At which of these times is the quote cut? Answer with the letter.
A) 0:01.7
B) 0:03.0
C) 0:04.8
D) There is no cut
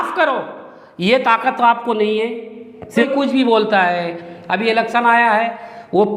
B